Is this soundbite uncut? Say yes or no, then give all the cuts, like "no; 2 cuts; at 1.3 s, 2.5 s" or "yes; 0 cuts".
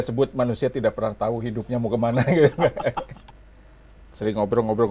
no; 1 cut; at 3.2 s